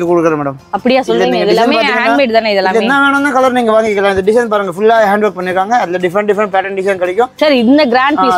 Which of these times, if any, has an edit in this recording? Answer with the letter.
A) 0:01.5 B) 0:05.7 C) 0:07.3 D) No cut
C